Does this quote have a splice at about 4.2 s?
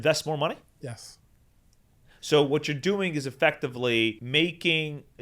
yes; 1 cut; at 4.2 s

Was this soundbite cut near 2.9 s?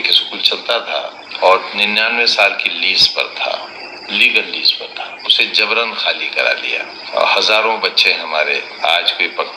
no; 4 cuts; at 1.3 s, 5.2 s, 7.0 s, 8.7 s

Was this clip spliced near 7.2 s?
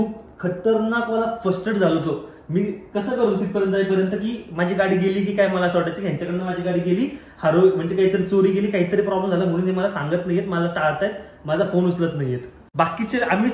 no; 1 cut; at 12.6 s

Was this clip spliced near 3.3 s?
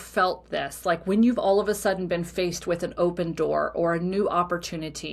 no; 0 cuts

